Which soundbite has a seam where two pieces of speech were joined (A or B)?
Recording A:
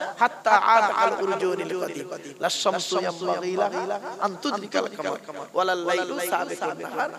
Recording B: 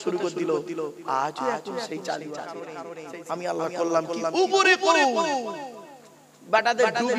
B